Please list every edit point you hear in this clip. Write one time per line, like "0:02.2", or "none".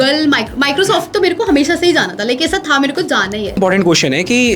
0:03.6